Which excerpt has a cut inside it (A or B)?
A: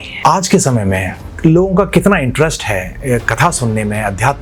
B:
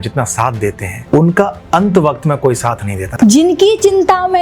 B